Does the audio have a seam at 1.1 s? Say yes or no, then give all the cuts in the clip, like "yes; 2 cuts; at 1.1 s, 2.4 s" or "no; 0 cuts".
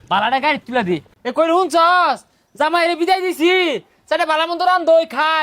yes; 1 cut; at 1.1 s